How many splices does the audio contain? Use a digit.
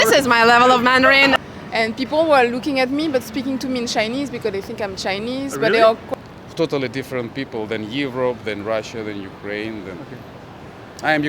2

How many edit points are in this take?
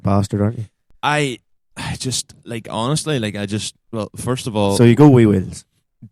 0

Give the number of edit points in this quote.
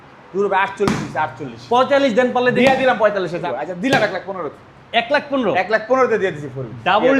1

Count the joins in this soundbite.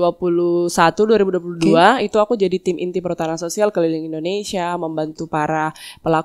0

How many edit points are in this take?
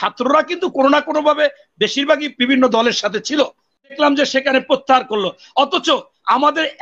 1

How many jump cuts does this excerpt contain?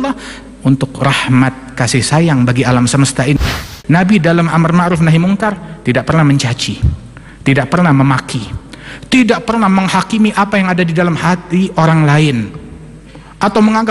1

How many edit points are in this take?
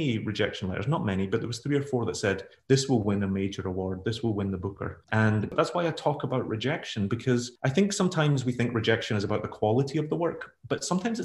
2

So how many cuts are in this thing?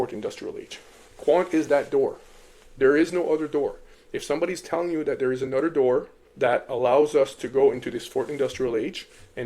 1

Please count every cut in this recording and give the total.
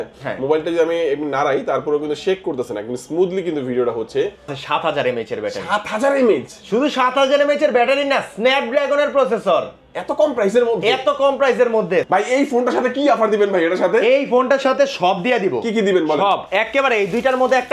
2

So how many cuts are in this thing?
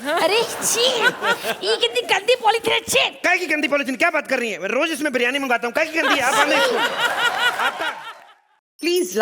1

